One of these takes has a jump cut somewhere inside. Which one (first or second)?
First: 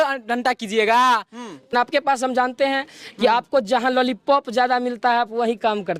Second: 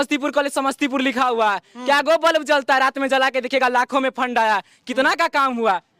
first